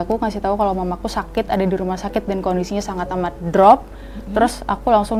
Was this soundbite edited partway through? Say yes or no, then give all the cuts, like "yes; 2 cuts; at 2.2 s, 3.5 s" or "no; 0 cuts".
no; 0 cuts